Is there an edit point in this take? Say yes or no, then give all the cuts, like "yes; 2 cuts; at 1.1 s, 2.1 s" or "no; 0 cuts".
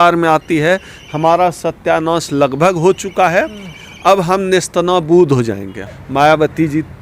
yes; 1 cut; at 5.8 s